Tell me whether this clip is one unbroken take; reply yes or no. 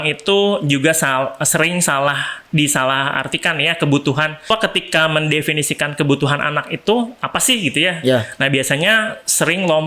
no